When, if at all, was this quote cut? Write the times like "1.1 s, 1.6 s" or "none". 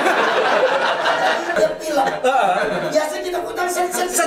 1.5 s

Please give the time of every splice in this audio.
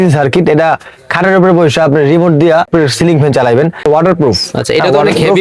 2.7 s, 3.8 s

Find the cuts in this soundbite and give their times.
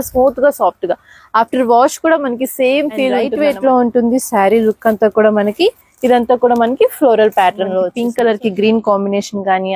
3.3 s, 8.0 s

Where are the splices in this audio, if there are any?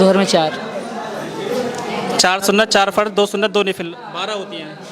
none

